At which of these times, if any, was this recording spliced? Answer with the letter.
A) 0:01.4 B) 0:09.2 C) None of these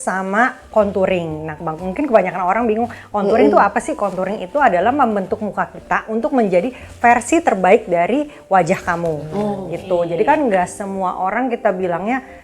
C